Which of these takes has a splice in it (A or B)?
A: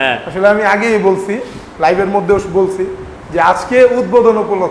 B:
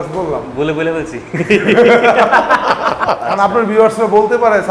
B